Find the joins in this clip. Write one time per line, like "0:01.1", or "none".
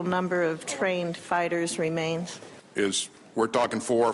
0:03.1